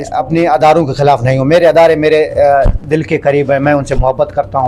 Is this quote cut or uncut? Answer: uncut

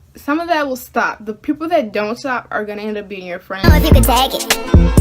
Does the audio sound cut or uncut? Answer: cut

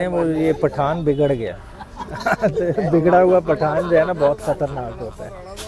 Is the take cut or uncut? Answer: uncut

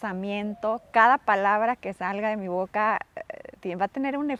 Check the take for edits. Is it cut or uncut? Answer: uncut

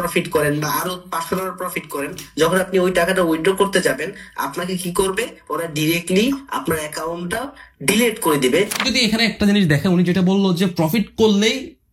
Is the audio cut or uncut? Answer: cut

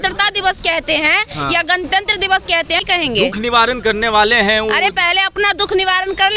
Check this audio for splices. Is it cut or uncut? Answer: cut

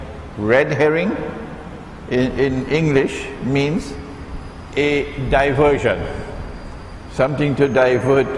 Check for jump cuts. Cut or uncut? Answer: uncut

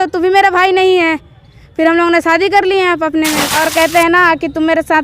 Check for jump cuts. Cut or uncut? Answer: cut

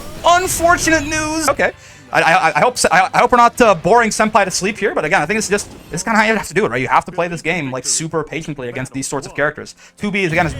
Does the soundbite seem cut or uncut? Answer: cut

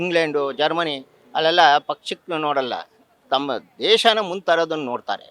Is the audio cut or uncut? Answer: uncut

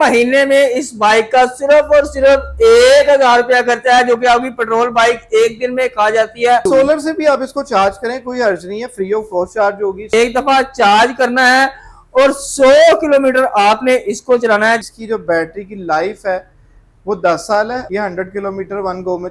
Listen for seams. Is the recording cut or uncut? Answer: cut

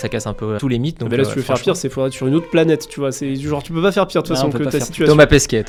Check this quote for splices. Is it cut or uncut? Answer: uncut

